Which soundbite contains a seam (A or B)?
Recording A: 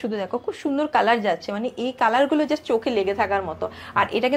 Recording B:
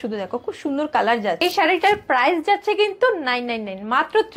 B